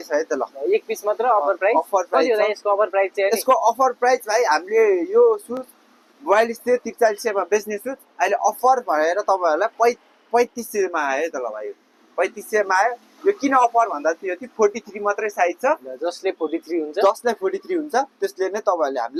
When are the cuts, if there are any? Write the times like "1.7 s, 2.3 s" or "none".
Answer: none